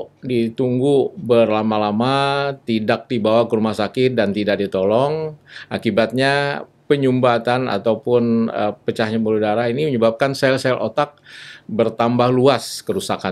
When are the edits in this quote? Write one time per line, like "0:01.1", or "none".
none